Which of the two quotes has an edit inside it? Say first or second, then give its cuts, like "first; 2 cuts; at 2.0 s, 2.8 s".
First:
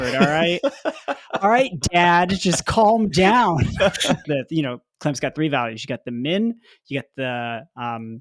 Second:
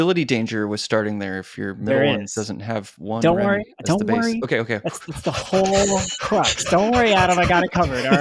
first; 1 cut; at 4.2 s